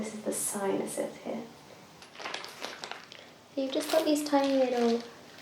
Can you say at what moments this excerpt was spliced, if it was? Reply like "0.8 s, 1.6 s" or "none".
2.1 s